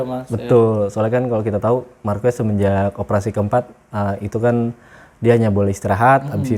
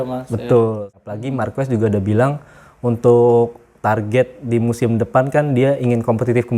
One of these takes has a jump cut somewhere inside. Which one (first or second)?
second